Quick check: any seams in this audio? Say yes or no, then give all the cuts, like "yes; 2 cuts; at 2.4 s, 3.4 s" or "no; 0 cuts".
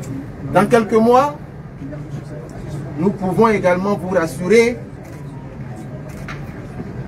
no; 0 cuts